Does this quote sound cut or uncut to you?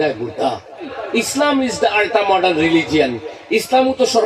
cut